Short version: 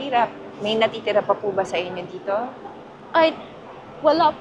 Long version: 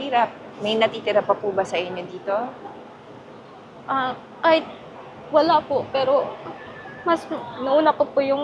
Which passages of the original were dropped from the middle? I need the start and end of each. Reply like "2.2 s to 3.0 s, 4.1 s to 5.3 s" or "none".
3.0 s to 4.3 s